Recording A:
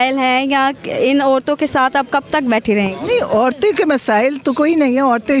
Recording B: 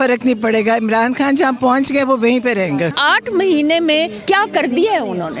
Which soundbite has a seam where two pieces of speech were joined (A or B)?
B